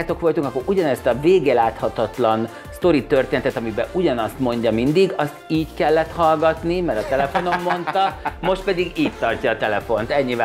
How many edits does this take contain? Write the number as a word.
zero